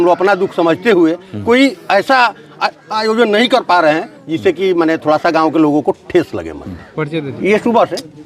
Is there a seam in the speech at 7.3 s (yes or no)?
yes